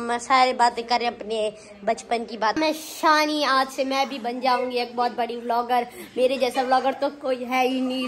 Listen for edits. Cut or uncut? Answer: cut